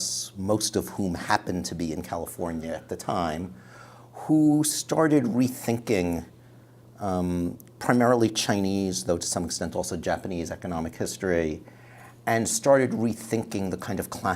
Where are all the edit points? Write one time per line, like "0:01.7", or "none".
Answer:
0:09.0